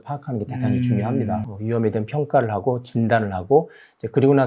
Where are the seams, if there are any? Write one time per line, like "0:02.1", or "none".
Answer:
0:01.5